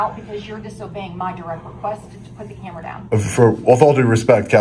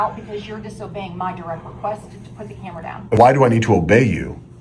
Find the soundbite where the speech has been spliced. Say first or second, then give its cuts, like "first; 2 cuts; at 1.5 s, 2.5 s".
second; 1 cut; at 3.1 s